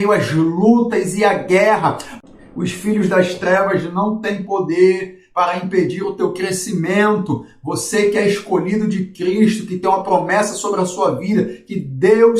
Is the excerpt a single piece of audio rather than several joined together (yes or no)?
no